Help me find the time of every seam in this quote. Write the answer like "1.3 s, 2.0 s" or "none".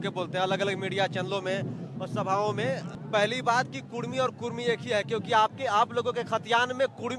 2.9 s